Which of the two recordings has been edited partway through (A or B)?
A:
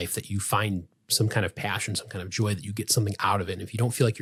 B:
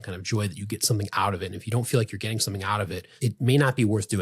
B